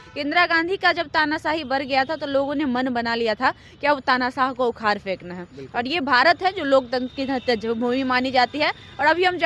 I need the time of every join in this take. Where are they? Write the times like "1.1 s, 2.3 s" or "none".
none